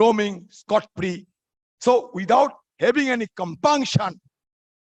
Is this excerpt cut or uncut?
uncut